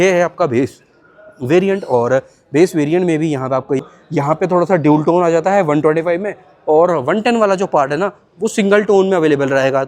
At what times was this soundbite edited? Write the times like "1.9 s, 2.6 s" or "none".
3.8 s